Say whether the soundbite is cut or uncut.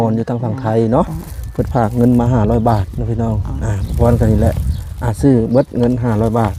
uncut